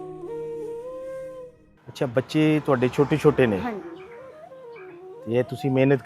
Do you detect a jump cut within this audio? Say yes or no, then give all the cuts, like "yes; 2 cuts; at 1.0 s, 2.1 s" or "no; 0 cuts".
no; 0 cuts